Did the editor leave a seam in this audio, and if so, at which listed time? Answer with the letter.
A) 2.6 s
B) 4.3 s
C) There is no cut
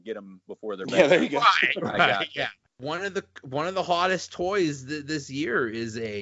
A